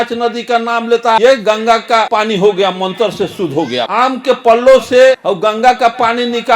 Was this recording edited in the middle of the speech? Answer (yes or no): yes